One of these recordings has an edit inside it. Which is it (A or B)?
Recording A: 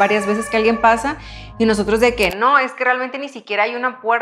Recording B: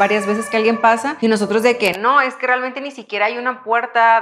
B